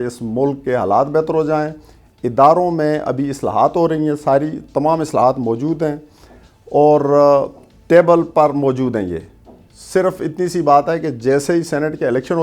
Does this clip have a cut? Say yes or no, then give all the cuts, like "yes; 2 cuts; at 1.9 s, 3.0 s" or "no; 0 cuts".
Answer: no; 0 cuts